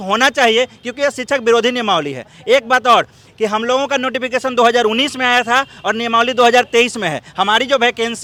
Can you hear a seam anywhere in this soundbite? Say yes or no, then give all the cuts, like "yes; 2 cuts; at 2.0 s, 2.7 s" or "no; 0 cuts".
no; 0 cuts